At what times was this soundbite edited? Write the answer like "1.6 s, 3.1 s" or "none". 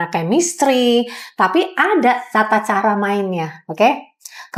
none